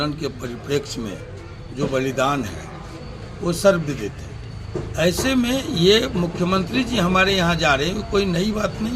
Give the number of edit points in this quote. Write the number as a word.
zero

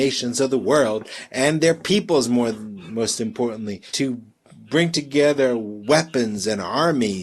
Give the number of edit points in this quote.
one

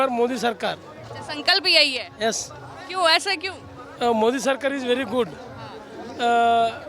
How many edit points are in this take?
zero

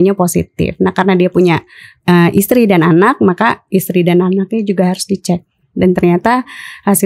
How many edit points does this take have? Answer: zero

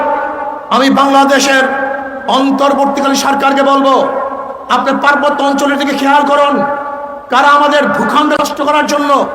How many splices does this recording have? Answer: one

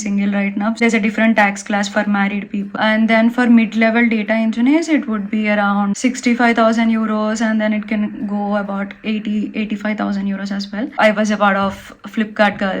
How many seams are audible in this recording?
four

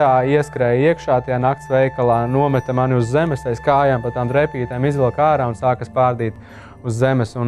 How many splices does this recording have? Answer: zero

